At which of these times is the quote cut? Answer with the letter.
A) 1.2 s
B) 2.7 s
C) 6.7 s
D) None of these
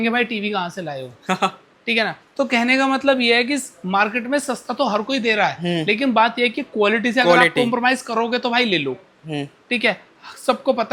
D